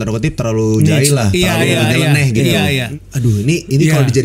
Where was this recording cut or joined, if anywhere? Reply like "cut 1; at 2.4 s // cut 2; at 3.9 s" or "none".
cut 1; at 2.8 s